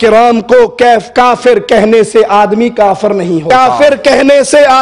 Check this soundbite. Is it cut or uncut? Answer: cut